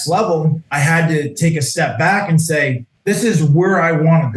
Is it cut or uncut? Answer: cut